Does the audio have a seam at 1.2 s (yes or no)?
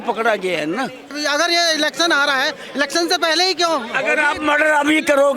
yes